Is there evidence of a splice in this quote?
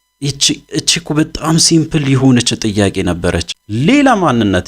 yes; 1 cut; at 3.6 s

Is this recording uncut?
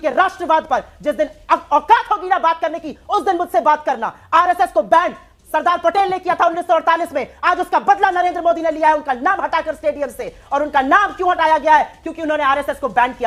yes; 0 cuts

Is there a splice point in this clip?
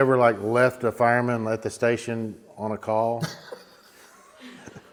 no; 0 cuts

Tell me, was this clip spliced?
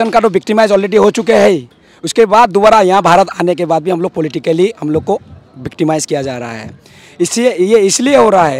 no; 0 cuts

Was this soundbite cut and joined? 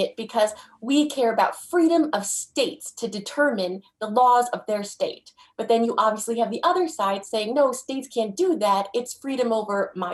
no; 0 cuts

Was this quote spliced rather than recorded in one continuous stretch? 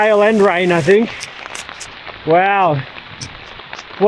no; 0 cuts

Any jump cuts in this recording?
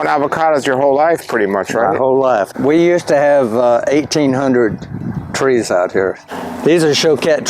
yes; 2 cuts; at 2.5 s, 6.2 s

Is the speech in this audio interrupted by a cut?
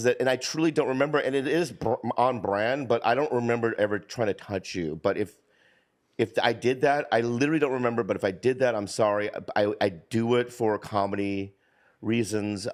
no; 0 cuts

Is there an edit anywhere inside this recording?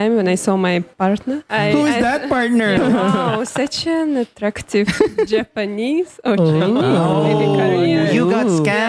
yes; 2 cuts; at 1.1 s, 2.8 s

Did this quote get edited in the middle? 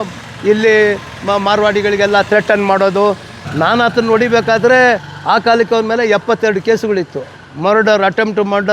yes; 1 cut; at 3.3 s

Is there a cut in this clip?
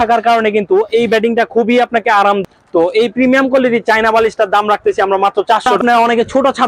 yes; 2 cuts; at 2.4 s, 5.7 s

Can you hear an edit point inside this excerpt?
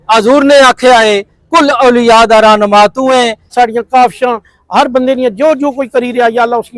yes; 1 cut; at 3.5 s

